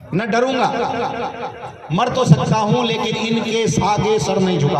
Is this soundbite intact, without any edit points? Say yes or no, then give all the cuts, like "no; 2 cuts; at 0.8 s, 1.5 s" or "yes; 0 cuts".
yes; 0 cuts